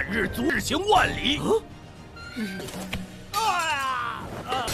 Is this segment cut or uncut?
cut